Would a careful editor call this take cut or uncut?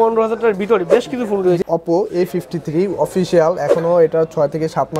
cut